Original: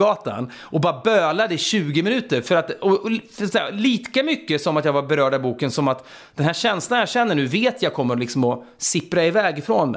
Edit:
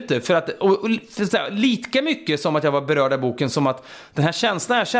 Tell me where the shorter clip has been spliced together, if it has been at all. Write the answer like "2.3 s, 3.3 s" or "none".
none